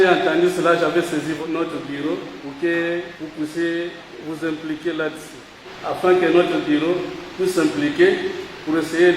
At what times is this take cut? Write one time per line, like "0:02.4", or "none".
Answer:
0:01.4
0:02.4
0:03.2
0:04.1
0:05.6
0:07.2